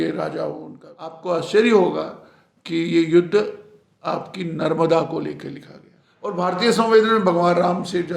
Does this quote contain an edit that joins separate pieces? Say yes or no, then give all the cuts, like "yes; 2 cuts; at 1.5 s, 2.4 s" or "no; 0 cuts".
yes; 2 cuts; at 1.2 s, 6.4 s